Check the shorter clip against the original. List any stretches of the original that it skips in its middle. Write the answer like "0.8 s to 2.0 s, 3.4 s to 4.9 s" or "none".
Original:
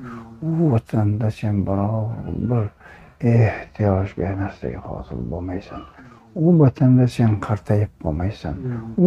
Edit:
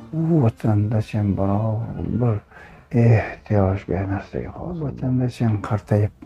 5.1 s to 6.6 s